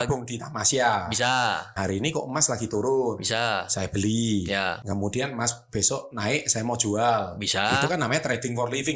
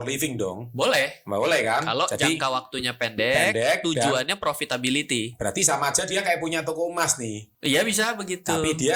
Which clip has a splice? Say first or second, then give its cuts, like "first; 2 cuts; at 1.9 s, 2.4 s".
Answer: first; 2 cuts; at 1.9 s, 4.8 s